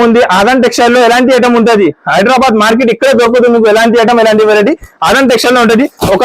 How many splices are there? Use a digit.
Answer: 0